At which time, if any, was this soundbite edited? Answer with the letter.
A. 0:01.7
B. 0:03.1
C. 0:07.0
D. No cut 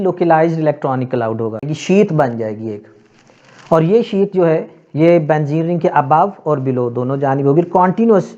A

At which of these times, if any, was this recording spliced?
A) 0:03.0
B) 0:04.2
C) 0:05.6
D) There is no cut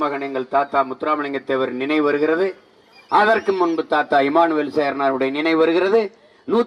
D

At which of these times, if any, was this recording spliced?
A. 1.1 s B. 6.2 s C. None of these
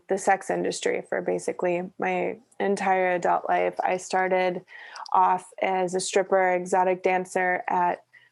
C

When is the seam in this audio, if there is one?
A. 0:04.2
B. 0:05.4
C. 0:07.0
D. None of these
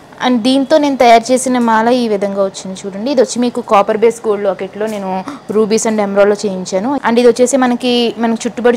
C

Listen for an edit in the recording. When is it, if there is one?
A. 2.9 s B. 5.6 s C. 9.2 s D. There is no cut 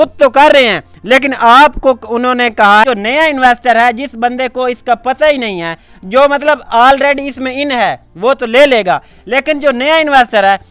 A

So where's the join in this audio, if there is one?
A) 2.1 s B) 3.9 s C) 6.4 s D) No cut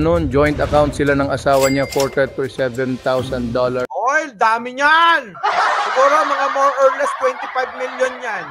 D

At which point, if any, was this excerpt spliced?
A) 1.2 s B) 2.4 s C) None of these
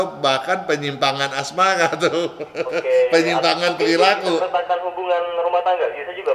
C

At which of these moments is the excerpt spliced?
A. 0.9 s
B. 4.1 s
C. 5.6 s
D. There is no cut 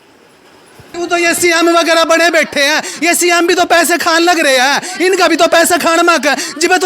A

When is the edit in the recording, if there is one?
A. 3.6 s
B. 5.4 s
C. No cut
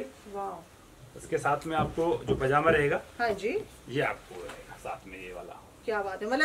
C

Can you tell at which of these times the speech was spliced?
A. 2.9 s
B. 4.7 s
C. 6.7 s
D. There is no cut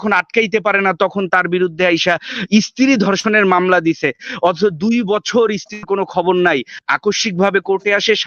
D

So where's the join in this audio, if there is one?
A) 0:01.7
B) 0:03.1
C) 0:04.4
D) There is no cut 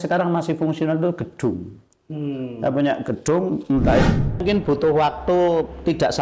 C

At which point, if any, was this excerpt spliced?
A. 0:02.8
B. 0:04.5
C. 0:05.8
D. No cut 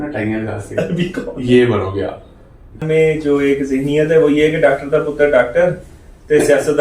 A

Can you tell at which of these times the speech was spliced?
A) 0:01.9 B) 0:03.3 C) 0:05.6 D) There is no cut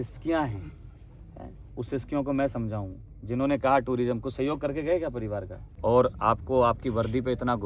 C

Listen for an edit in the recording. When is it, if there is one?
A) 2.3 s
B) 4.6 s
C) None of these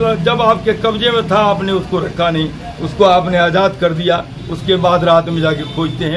C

